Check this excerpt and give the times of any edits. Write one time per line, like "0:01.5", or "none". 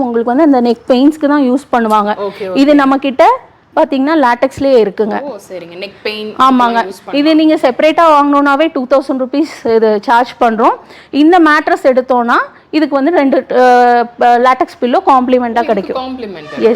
none

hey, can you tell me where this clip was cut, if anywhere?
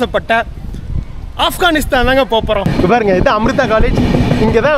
0:02.7

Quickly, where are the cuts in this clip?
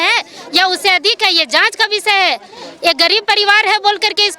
none

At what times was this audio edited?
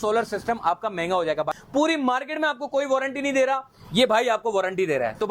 0:01.5

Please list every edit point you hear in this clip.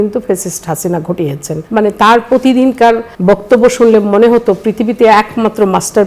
0:01.5
0:03.1

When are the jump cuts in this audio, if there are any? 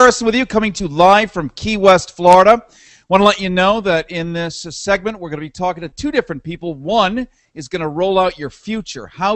none

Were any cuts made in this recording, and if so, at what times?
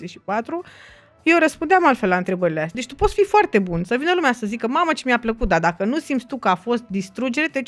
0:02.8

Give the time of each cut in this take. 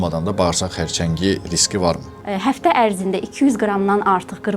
0:02.1

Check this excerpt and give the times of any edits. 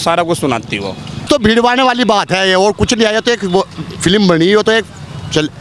0:01.3

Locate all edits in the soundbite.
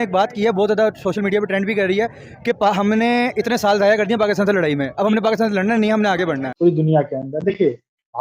0:06.5

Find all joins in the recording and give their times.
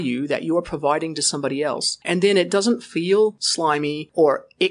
0:02.0
0:03.6

